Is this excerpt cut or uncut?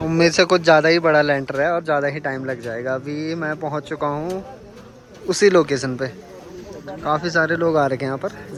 uncut